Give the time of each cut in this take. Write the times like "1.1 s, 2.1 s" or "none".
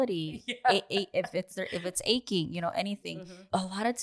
3.0 s